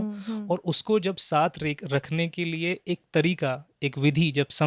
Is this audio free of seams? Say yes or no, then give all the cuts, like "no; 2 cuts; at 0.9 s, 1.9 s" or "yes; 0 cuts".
yes; 0 cuts